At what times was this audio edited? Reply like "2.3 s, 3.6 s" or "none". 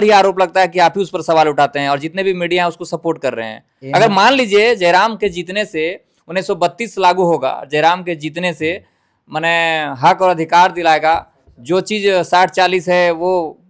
none